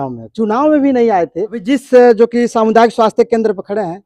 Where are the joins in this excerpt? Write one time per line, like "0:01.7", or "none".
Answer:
0:01.5